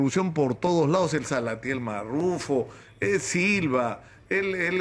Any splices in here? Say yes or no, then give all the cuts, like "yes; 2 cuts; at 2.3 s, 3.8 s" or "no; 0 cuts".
no; 0 cuts